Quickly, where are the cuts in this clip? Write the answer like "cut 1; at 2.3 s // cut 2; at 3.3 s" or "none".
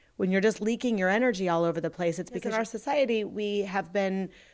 cut 1; at 2.5 s